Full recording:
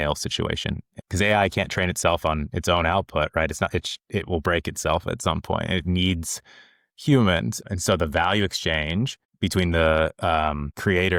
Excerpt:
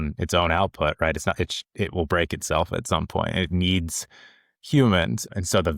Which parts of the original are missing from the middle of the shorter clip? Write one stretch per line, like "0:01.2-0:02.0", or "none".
none

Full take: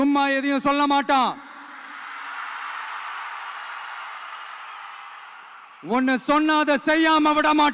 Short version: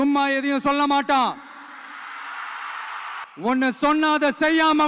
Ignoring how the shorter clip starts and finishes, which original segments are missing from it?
0:03.2-0:05.7

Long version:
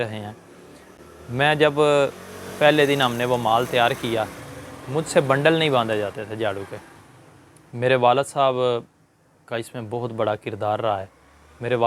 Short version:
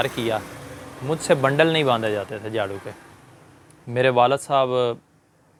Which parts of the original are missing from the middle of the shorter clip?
none

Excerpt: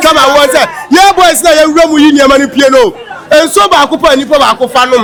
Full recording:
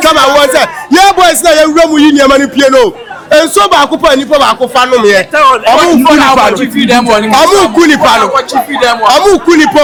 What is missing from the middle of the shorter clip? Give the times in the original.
none

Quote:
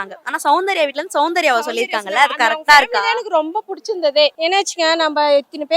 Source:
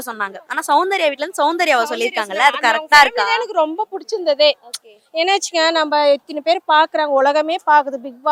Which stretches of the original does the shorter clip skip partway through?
0:04.6-0:05.1

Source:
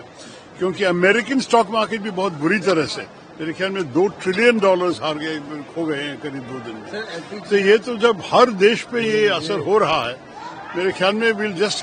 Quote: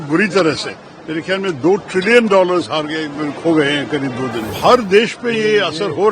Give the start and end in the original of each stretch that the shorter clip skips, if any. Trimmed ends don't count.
0:06.8-0:08.2

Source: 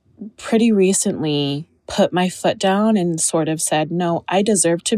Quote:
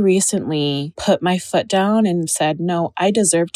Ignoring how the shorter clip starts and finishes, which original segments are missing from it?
0:01.6-0:01.8
0:03.2-0:03.6

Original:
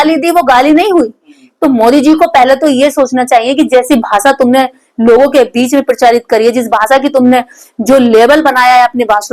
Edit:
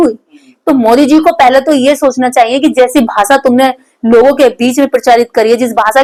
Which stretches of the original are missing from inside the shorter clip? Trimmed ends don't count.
none

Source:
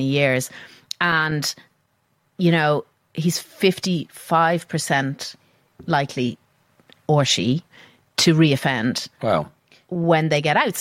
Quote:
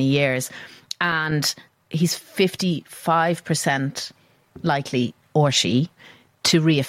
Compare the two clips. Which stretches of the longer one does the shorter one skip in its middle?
0:01.8-0:03.0
0:06.4-0:06.9

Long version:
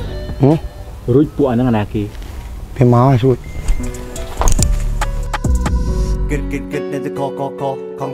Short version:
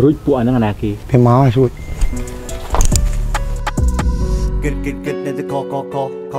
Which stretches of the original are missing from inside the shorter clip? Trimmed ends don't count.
0:02.0-0:02.6

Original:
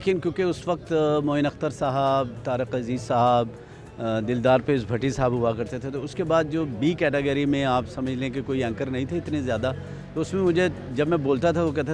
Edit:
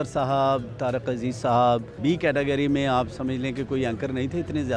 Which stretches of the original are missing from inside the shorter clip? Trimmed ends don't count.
0:03.6-0:06.7

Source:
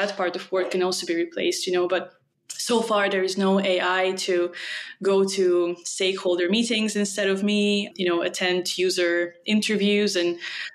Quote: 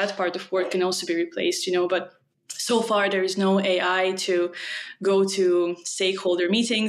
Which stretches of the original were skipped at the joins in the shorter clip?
none

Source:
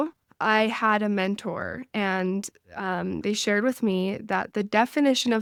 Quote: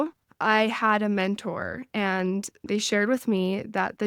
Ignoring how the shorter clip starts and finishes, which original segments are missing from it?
0:02.6-0:03.2

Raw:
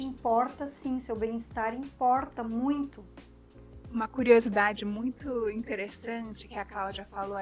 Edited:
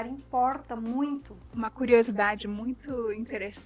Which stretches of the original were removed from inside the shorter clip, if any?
0:03.0-0:03.7

